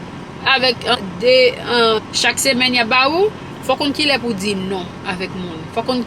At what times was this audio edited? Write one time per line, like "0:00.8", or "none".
0:01.0
0:02.0
0:03.5

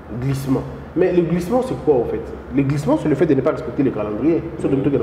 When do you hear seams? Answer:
none

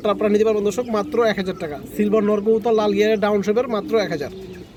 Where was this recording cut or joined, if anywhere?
none

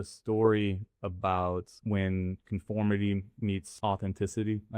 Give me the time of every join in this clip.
0:01.7
0:03.7

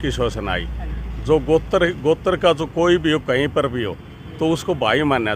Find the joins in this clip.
none

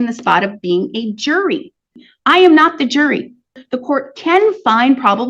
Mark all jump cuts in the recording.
0:02.0
0:03.6

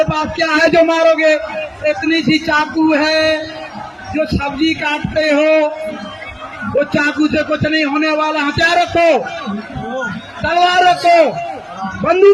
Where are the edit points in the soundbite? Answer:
none

